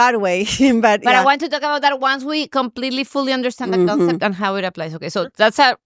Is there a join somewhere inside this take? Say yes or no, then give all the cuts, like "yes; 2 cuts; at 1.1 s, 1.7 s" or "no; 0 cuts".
no; 0 cuts